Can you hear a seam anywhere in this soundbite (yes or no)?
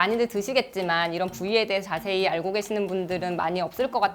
no